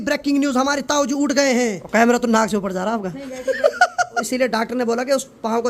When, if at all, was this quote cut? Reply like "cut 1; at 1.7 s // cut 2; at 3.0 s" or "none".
cut 1; at 1.8 s // cut 2; at 4.2 s